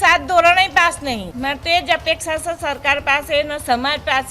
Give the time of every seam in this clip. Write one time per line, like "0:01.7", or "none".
0:01.3